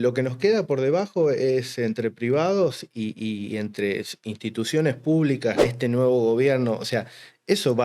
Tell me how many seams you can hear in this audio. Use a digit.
1